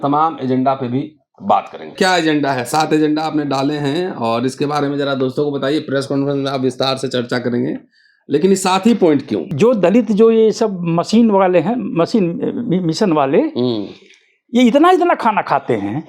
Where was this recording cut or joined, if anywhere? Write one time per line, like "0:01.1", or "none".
0:01.9
0:09.4